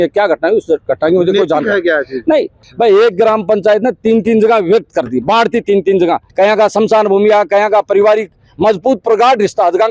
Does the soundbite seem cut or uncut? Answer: cut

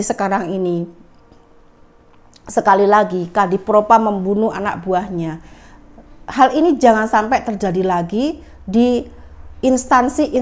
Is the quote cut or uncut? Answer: uncut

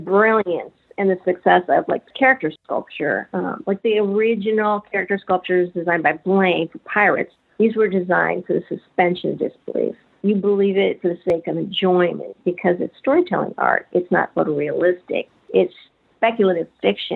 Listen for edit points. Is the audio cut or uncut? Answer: cut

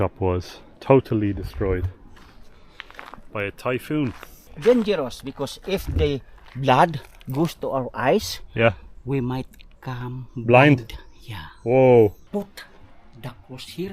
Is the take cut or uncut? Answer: cut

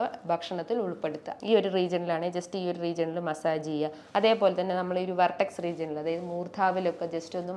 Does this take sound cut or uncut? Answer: cut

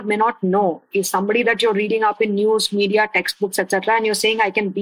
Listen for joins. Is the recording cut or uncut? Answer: uncut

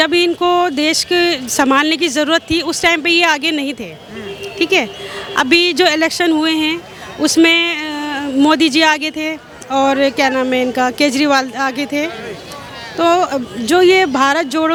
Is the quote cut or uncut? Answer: uncut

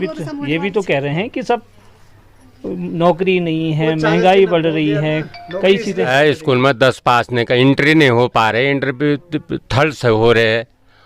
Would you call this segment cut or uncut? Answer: cut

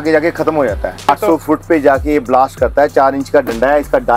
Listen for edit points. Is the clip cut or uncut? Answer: cut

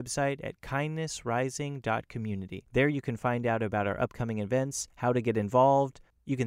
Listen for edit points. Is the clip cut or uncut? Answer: cut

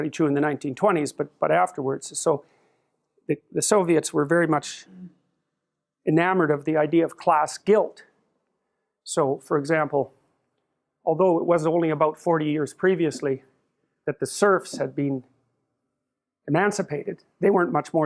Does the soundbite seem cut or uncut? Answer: uncut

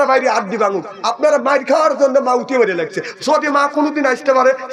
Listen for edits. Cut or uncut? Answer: uncut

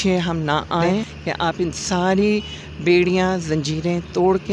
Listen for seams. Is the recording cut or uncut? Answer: cut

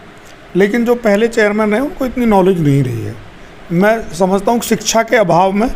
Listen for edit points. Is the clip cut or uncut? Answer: uncut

